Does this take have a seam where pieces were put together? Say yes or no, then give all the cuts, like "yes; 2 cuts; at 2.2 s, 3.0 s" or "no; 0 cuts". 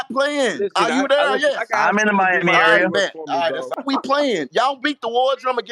yes; 1 cut; at 3.7 s